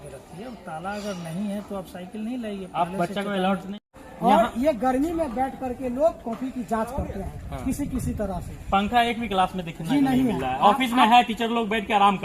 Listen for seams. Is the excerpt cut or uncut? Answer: cut